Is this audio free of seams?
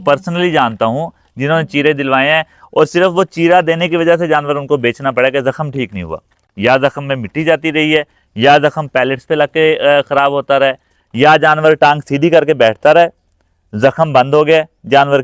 yes; 0 cuts

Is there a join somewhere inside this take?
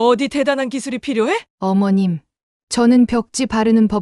yes; 1 cut; at 1.5 s

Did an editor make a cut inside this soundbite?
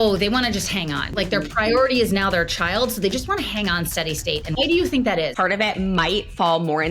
yes; 3 cuts; at 1.1 s, 4.6 s, 5.3 s

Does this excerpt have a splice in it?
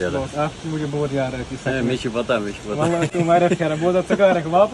no; 0 cuts

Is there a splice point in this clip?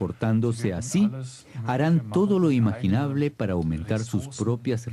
no; 0 cuts

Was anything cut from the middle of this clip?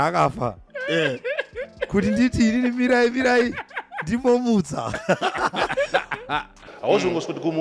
yes; 1 cut; at 6.6 s

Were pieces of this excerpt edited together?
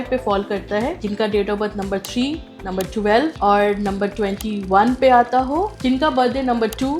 yes; 3 cuts; at 1.0 s, 3.4 s, 5.7 s

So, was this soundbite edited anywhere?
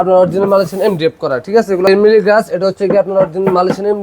yes; 1 cut; at 1.9 s

